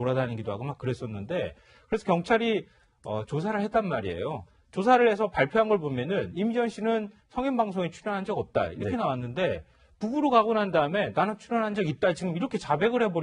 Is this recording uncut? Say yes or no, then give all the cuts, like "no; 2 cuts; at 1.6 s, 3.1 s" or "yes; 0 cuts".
no; 1 cut; at 5.5 s